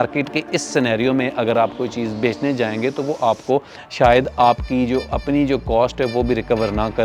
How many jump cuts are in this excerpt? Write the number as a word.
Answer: zero